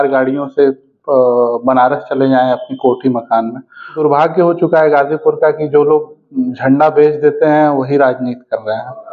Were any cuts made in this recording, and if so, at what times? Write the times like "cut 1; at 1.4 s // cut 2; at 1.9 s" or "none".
cut 1; at 4.0 s